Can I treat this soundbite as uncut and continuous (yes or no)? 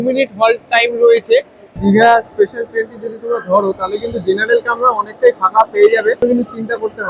no